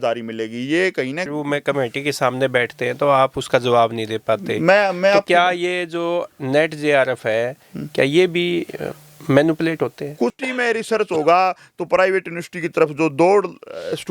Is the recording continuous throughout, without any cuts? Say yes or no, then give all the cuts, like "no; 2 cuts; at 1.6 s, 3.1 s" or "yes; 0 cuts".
no; 2 cuts; at 1.3 s, 10.3 s